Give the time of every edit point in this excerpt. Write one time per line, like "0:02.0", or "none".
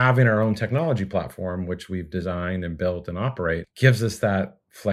0:03.7

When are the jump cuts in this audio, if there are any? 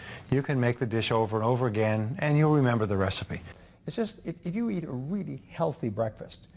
0:03.5

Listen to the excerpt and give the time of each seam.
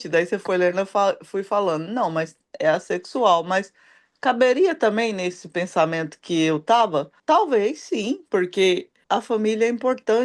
0:07.1
0:08.9

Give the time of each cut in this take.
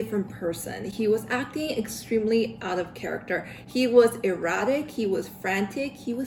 none

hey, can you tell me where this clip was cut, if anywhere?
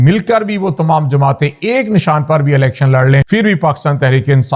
0:03.2

